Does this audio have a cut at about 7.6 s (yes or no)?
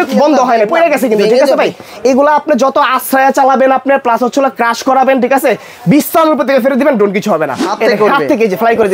yes